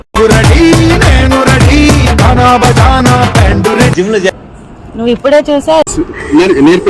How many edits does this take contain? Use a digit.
1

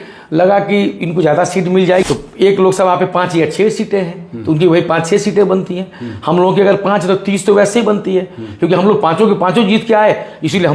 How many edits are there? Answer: 1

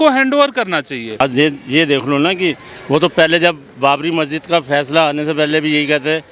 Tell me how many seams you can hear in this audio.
1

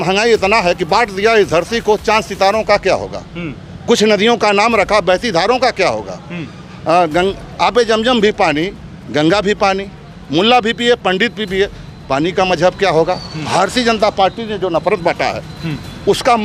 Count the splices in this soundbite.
0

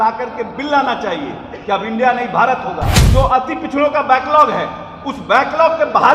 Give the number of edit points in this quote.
1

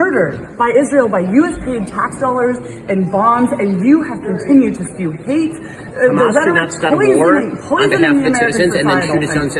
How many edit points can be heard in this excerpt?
0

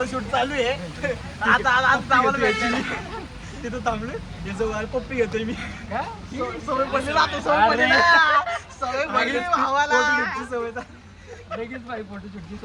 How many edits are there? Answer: 0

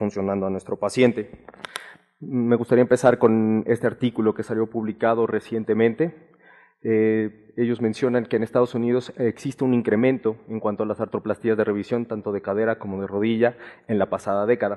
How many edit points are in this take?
1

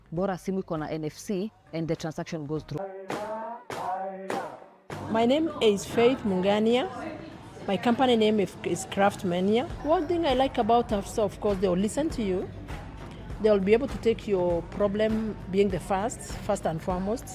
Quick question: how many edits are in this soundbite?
2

